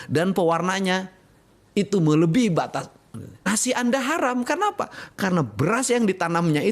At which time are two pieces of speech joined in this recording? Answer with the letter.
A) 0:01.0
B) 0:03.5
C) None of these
B